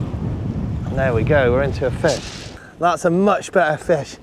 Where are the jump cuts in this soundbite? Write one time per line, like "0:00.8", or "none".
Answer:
0:02.6